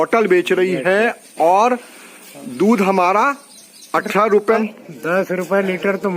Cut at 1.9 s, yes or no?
yes